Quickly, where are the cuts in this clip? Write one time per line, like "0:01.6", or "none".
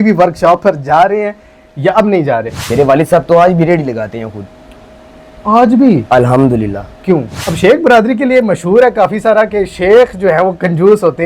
0:02.6
0:07.4